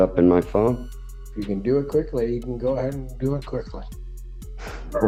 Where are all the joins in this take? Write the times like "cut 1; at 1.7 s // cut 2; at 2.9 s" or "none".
none